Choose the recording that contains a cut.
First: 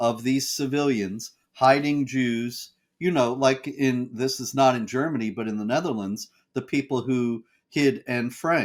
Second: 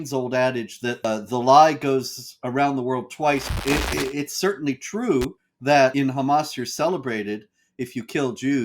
second; 3 cuts; at 1.0 s, 3.5 s, 5.4 s

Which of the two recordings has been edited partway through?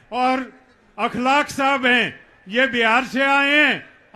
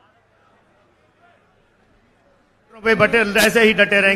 second; 1 cut; at 2.8 s

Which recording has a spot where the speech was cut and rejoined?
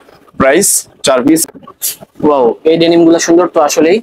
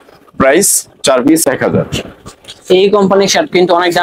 first; 1 cut; at 1.4 s

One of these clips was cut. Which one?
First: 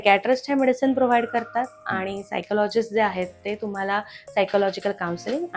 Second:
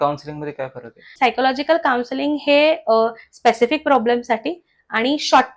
second; 1 cut; at 1.0 s

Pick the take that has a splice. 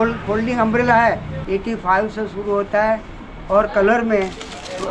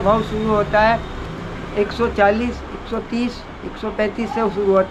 first; 1 cut; at 1.3 s

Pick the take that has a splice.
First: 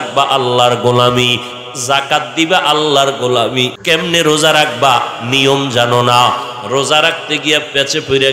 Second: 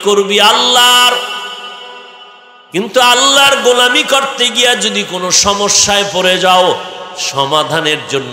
first; 1 cut; at 3.8 s

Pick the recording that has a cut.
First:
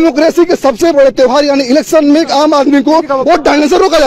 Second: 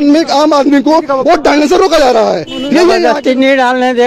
second; 1 cut; at 3.0 s

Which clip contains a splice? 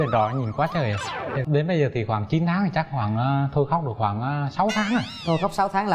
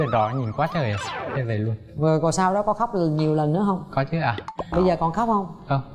first; 1 cut; at 1.4 s

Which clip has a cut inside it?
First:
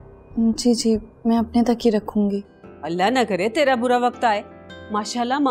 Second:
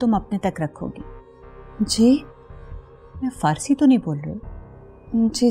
first; 1 cut; at 2.6 s

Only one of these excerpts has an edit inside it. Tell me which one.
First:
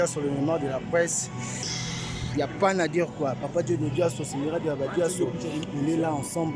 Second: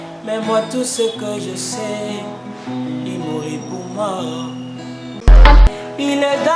second; 1 cut; at 5.5 s

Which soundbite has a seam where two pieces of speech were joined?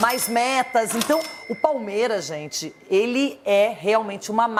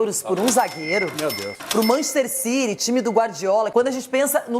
second; 1 cut; at 3.7 s

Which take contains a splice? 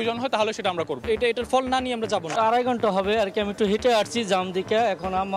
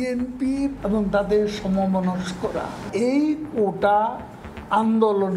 first; 2 cuts; at 1.0 s, 2.3 s

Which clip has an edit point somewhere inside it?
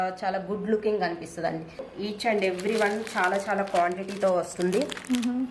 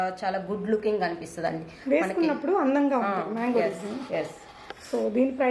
first; 1 cut; at 1.8 s

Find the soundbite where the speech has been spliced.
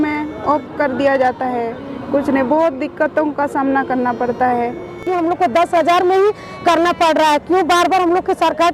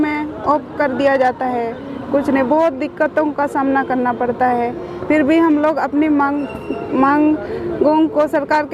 first; 1 cut; at 5.0 s

